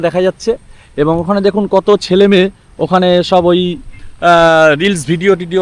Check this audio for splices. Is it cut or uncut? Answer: uncut